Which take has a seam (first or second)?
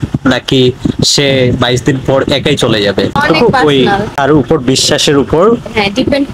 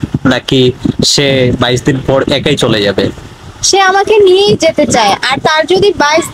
first